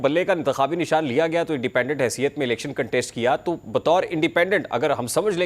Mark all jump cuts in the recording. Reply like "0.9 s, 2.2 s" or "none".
none